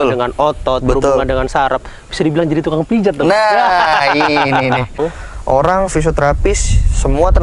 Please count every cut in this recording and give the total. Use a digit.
1